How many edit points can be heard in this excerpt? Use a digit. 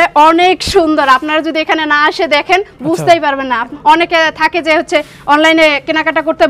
1